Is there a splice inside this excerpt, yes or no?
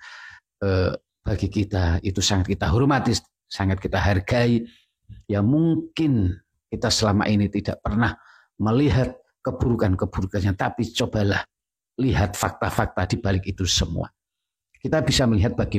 no